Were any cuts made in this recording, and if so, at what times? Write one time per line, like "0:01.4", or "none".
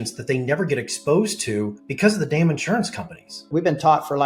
0:01.8
0:03.4